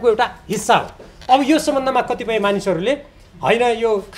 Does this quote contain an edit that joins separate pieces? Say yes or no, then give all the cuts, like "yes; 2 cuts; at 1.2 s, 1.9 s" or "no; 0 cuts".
no; 0 cuts